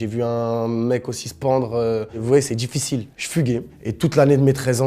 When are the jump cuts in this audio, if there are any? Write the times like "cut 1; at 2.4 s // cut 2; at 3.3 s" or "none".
cut 1; at 2.2 s // cut 2; at 3.7 s